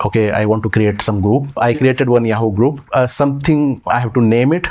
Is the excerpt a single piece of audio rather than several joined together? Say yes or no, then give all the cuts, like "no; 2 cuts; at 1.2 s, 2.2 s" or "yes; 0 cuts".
no; 2 cuts; at 1.6 s, 2.8 s